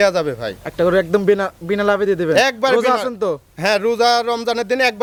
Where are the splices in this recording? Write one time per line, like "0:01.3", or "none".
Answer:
none

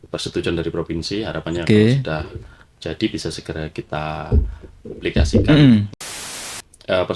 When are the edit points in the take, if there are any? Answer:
0:06.2

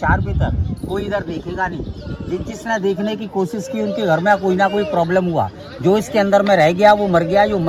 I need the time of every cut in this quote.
none

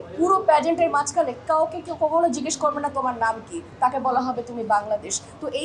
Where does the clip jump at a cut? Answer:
none

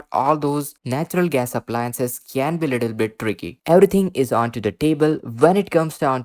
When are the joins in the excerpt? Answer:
0:03.5

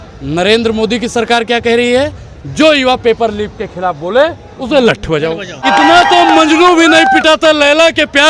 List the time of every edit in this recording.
0:05.6

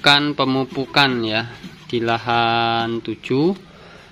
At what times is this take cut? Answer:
none

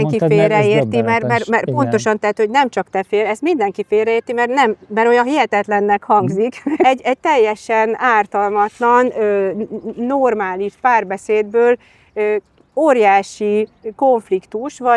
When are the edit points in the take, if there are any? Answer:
0:06.8

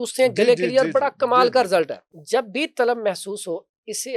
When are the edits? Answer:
0:02.0

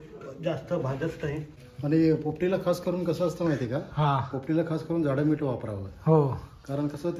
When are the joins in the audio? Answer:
0:01.5

